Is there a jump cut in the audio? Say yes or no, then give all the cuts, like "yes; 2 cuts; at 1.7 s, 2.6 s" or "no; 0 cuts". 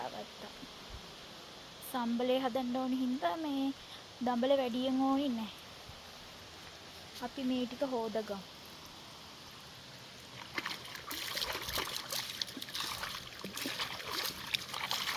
no; 0 cuts